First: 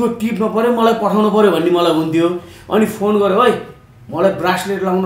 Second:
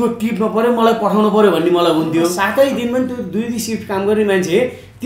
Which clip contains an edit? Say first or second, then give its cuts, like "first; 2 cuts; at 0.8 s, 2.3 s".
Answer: second; 1 cut; at 2.4 s